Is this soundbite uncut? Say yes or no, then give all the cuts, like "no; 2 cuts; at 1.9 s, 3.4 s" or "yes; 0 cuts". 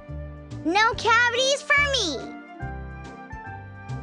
no; 1 cut; at 2.6 s